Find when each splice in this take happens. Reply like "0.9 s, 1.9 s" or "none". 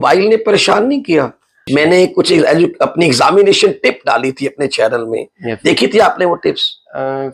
1.6 s